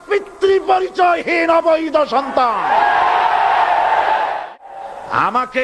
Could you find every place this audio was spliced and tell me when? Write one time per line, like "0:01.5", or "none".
0:04.5